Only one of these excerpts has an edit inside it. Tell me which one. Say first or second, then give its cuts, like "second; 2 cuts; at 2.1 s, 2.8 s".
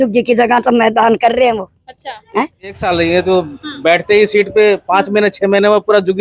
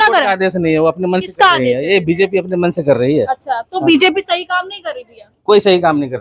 first; 1 cut; at 2.8 s